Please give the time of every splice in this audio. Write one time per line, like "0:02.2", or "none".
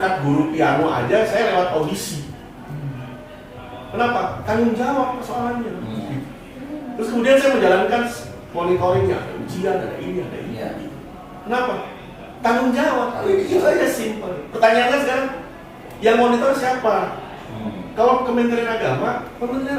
none